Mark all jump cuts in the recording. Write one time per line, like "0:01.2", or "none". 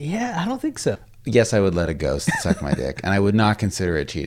0:01.0